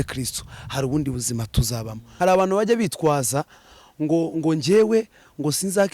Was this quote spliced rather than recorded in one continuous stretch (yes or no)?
yes